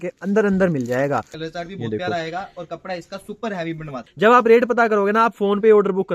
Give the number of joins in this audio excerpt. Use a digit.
2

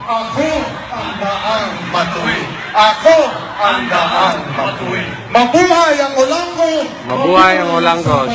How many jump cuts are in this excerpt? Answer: 0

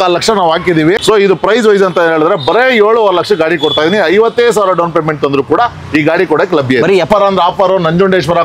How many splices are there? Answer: 2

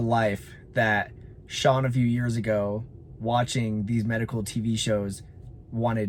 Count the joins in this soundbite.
0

